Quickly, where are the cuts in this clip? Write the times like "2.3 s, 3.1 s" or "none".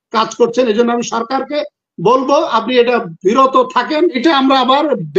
4.2 s

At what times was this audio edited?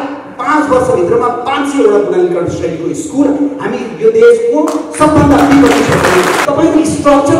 6.4 s

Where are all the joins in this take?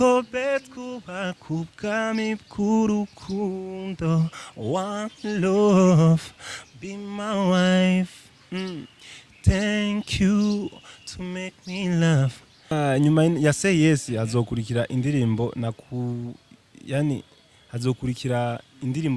12.7 s

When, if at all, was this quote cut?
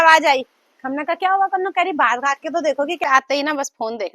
3.0 s

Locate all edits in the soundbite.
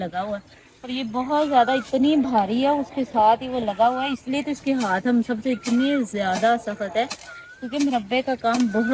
none

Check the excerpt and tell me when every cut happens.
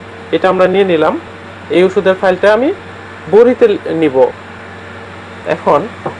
none

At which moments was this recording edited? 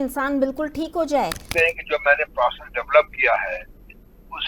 1.5 s

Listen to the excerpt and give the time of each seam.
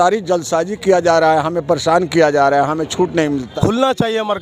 3.5 s

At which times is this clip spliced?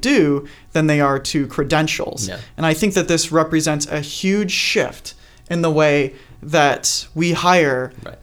none

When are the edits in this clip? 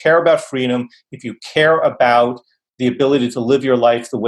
none

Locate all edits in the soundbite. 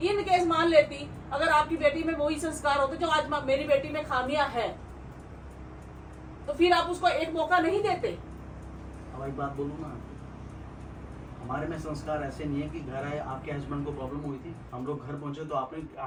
none

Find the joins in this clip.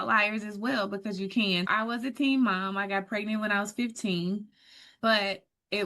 1.7 s, 4.9 s

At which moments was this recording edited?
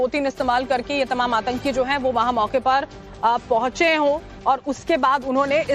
3.7 s

